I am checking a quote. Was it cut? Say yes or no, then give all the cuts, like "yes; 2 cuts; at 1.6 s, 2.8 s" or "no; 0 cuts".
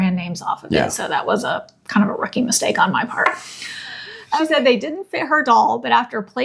yes; 1 cut; at 4.1 s